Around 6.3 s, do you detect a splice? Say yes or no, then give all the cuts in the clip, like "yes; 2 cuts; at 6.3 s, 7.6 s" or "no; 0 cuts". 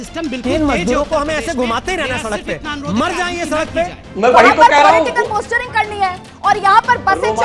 no; 1 cut; at 4.1 s